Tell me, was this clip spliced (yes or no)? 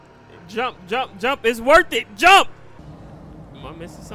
yes